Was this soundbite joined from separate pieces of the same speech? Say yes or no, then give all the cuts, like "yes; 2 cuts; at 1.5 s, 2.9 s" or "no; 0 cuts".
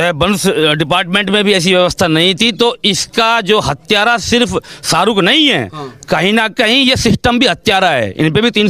no; 0 cuts